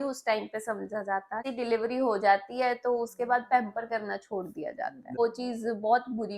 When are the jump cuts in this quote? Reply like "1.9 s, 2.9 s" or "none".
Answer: 1.5 s, 5.2 s